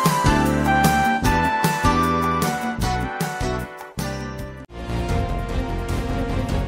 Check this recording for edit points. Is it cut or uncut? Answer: cut